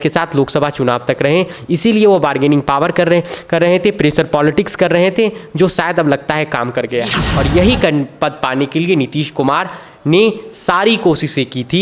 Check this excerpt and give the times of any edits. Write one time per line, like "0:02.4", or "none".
0:07.3